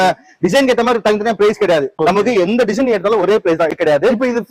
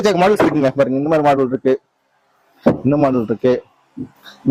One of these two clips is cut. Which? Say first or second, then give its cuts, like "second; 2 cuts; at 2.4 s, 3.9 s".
first; 2 cuts; at 1.9 s, 3.7 s